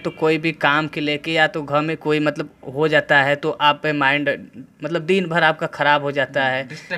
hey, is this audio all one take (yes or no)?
yes